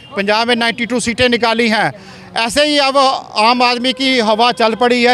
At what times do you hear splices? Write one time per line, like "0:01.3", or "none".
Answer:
none